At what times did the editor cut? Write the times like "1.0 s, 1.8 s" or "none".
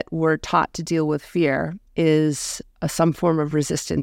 1.8 s